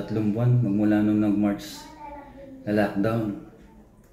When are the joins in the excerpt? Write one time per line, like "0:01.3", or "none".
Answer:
none

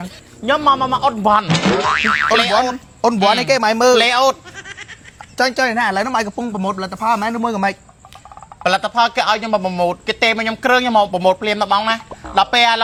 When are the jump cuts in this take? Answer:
none

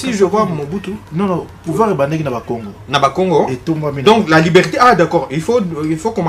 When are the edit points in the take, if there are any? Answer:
none

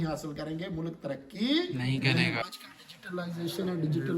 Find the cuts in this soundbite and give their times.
0:02.4

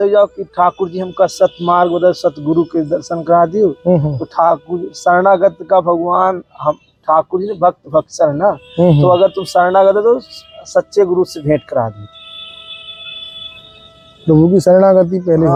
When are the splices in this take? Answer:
none

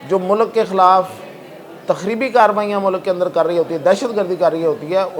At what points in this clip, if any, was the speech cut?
none

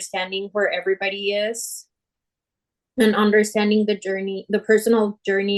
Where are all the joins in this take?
none

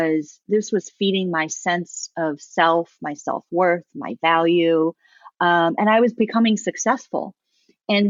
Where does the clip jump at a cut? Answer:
none

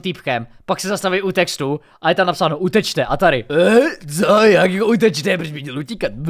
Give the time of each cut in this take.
none

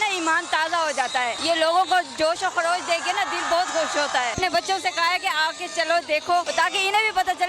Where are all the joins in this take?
0:01.4
0:04.4
0:06.5

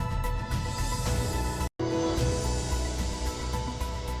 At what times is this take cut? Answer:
0:01.7

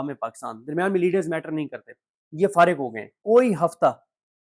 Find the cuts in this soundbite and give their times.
0:03.2

